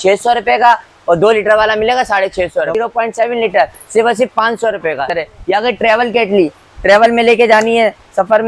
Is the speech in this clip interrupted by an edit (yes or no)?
yes